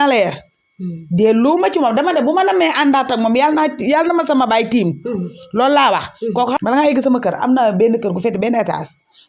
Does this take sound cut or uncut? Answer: cut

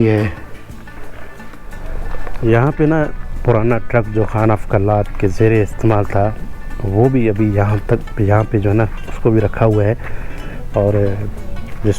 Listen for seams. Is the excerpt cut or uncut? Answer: cut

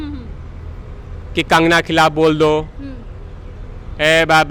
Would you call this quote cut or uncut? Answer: uncut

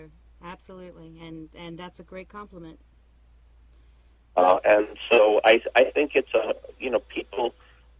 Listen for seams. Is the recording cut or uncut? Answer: cut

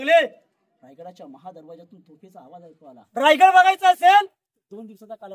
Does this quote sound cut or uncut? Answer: cut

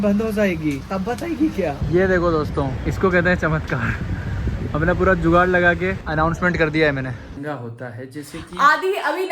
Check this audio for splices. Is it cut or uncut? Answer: cut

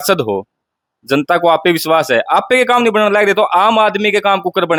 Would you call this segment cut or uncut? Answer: uncut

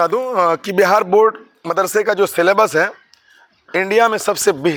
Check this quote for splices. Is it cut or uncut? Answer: uncut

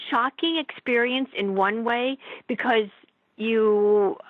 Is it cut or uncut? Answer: uncut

